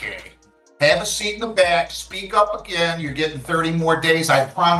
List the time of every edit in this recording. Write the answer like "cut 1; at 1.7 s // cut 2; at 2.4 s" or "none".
none

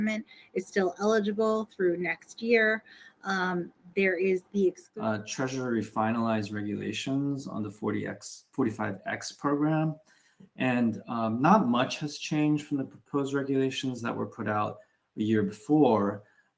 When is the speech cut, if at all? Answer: cut 1; at 4.8 s

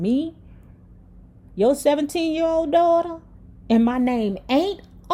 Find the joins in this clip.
none

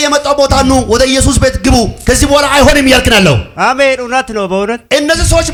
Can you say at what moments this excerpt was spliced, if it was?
none

